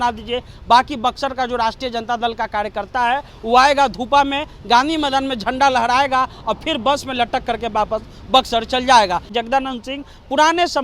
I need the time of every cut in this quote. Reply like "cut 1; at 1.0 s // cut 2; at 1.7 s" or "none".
cut 1; at 9.3 s